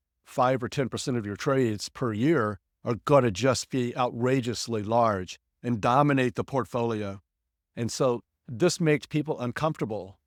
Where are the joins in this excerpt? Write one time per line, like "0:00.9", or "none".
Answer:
none